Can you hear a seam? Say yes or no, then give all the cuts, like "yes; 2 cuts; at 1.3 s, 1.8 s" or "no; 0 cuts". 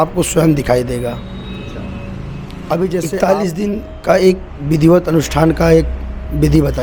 yes; 1 cut; at 3.1 s